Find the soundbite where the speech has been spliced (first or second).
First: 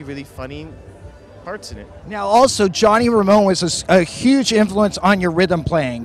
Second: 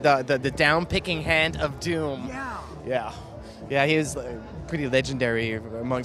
second